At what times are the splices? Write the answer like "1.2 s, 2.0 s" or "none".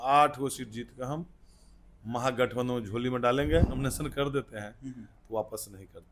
3.7 s